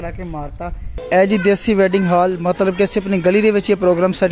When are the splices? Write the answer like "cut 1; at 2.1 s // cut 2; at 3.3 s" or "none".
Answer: cut 1; at 0.9 s